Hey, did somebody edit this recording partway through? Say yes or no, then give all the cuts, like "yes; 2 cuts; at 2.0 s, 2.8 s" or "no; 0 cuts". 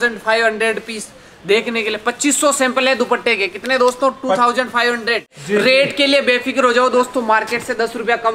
yes; 1 cut; at 5.3 s